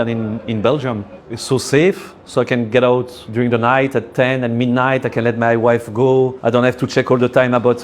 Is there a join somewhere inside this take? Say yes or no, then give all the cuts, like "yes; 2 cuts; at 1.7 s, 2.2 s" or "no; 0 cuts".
yes; 3 cuts; at 1.1 s, 3.2 s, 6.4 s